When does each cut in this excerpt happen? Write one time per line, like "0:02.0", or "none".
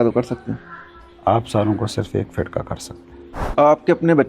0:03.2